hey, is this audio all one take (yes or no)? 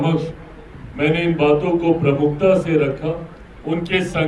yes